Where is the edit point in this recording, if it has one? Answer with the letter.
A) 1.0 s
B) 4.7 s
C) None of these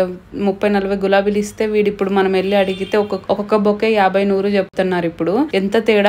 C